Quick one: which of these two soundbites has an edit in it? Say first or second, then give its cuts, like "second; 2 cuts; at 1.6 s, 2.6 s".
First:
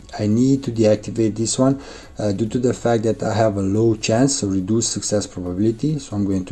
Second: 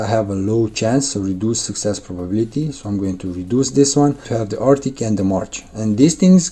second; 1 cut; at 4.3 s